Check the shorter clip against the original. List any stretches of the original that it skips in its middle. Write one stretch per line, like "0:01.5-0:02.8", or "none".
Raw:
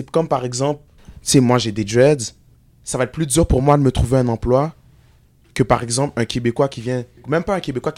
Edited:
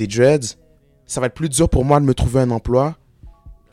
none

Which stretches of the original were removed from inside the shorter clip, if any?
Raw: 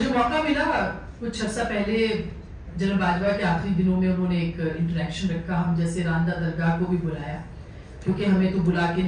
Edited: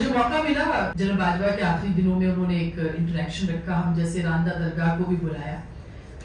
0:00.9-0:02.7

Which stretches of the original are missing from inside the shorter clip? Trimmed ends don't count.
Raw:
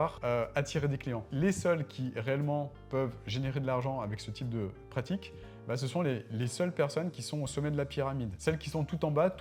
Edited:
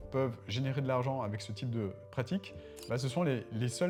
none

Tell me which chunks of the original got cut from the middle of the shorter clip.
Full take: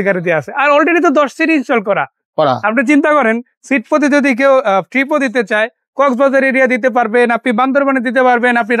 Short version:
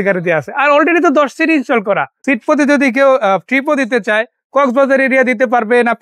0:02.1-0:03.6

